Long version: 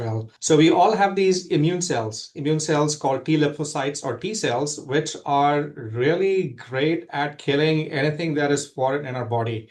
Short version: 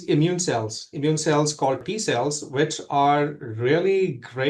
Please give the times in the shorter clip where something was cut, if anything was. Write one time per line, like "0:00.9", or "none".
0:01.8